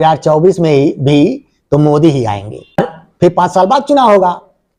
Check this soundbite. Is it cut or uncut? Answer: uncut